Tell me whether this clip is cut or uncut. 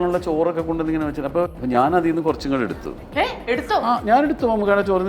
cut